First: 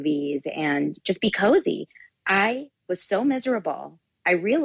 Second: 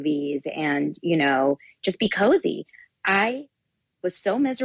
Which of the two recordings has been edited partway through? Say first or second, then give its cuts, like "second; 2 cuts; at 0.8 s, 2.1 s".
first; 2 cuts; at 1.0 s, 2.7 s